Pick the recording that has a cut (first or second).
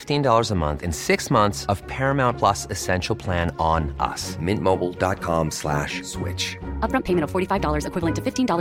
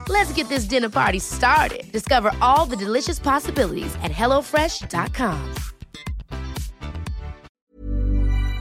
second